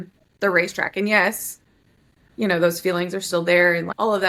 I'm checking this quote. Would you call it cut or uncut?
uncut